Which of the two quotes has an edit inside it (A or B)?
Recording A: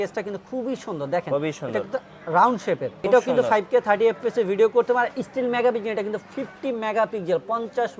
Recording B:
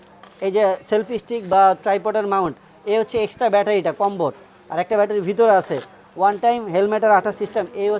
A